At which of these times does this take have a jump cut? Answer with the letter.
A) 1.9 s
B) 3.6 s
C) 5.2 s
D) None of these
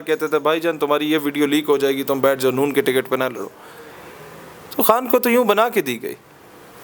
D